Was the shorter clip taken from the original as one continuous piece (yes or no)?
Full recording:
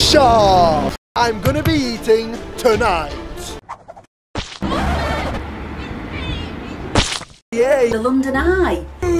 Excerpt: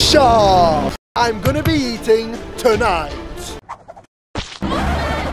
yes